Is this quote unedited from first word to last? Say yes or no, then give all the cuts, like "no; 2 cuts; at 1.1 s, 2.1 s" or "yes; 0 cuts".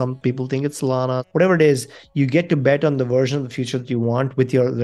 no; 1 cut; at 1.2 s